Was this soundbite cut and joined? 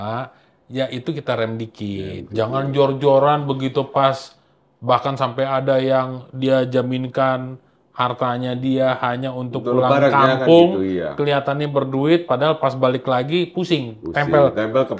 no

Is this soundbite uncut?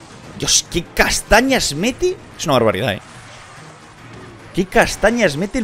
yes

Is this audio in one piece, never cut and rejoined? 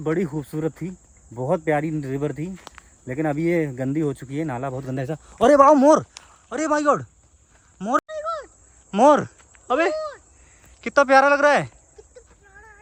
yes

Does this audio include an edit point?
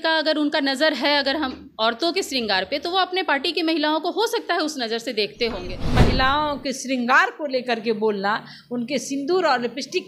yes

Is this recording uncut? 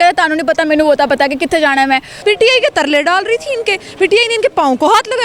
no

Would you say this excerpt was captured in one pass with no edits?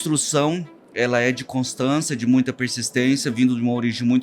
yes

